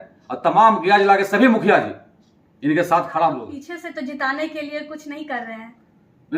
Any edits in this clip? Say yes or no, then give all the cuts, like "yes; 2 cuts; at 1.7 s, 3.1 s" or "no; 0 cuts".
yes; 1 cut; at 3.6 s